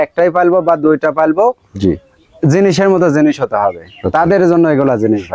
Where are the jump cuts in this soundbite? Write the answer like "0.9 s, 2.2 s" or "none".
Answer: none